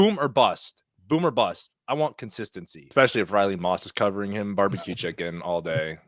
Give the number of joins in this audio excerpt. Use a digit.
1